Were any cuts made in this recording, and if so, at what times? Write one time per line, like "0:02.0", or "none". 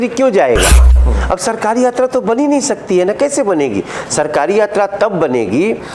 0:00.9